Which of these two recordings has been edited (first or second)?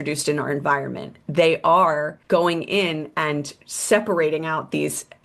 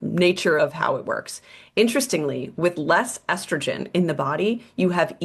first